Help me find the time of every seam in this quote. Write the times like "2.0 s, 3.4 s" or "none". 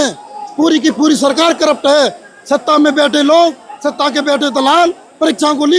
none

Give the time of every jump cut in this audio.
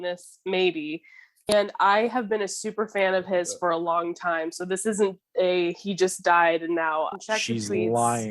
1.5 s, 7.1 s

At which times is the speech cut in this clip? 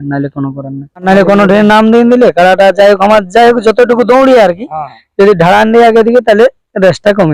1.1 s

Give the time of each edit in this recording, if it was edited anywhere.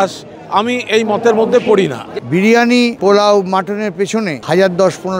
2.1 s, 3.0 s, 4.4 s

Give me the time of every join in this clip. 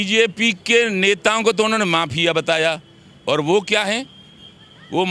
none

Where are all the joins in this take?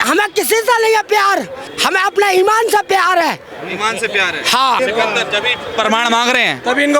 1.6 s, 4.8 s

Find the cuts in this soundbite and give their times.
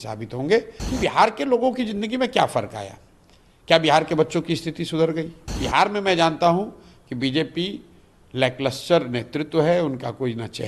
0.9 s, 5.5 s

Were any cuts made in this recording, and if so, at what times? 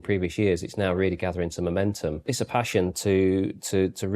2.3 s

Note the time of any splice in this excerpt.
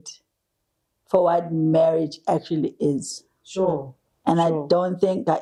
none

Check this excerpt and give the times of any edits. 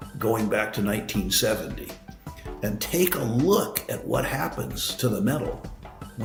none

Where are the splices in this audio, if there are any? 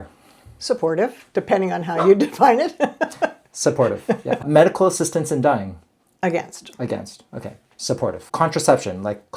4.3 s, 8.3 s

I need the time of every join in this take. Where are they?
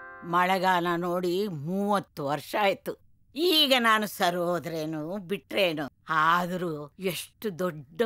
6.0 s, 6.9 s

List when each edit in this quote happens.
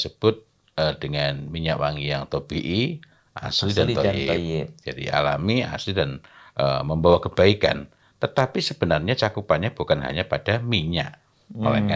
none

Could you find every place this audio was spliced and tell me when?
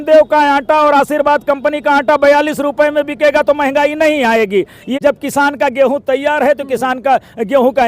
4.9 s

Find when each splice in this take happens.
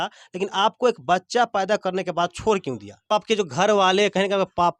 3.1 s

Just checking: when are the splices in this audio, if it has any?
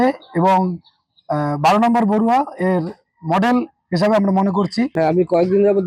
4.9 s

